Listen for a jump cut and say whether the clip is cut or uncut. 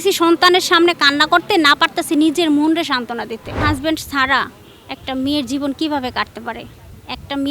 cut